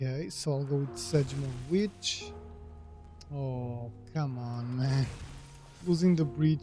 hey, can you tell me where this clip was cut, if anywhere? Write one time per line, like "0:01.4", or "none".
none